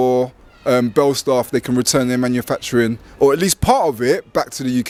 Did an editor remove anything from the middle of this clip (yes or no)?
no